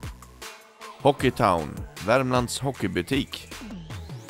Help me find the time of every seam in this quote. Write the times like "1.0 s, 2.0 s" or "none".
3.3 s